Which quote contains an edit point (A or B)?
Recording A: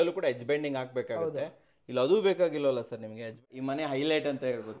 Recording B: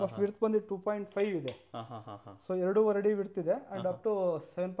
A